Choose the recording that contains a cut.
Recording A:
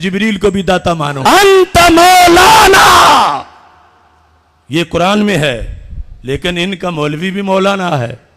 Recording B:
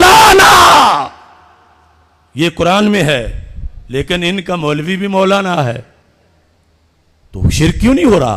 A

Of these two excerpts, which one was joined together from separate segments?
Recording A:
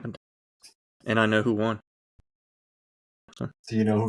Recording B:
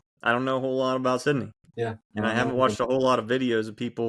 B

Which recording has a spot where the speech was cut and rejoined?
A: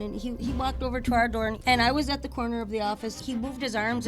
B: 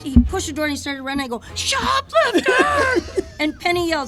A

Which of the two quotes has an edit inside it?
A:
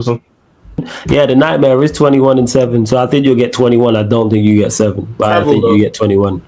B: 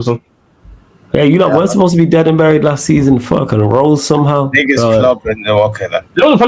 A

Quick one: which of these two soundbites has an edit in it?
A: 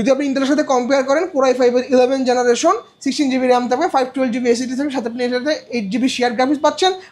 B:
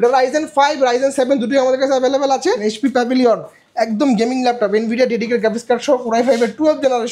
B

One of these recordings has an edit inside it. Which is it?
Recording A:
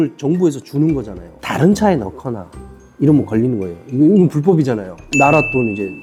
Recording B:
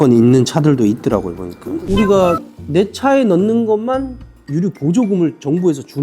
B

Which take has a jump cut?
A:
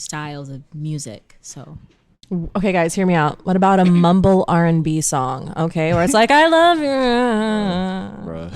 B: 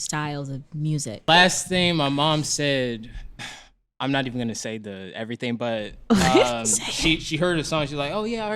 B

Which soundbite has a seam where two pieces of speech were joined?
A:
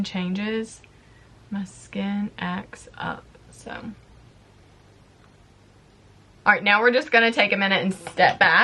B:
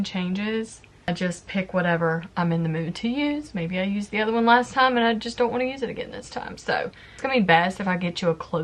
B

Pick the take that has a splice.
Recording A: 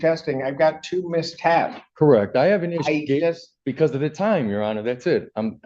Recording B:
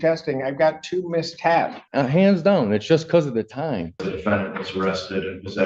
B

